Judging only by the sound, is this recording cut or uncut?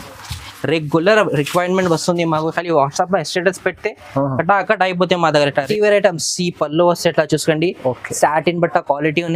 cut